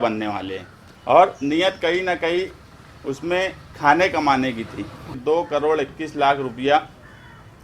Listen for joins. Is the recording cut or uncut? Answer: cut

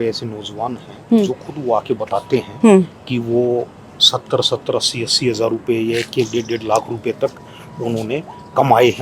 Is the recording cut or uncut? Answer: uncut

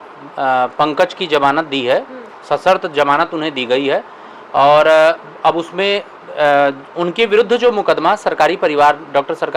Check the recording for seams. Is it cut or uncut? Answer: uncut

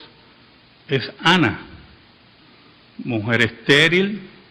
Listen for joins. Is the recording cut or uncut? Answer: uncut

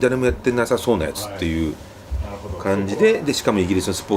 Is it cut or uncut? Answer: uncut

